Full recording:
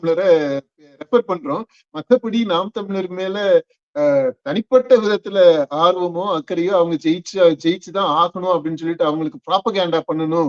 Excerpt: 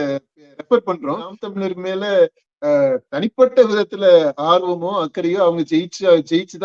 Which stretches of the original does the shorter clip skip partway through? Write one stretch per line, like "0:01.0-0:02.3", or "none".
0:01.8-0:02.8